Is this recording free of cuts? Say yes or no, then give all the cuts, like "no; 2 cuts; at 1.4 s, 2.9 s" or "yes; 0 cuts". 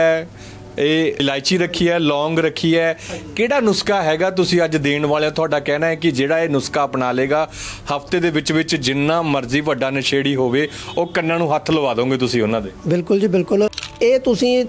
no; 2 cuts; at 1.2 s, 13.9 s